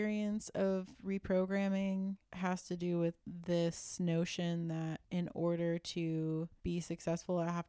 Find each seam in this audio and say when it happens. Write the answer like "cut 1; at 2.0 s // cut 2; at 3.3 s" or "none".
cut 1; at 2.3 s // cut 2; at 3.2 s // cut 3; at 5.0 s // cut 4; at 6.5 s